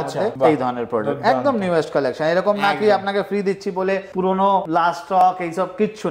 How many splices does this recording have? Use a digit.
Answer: 0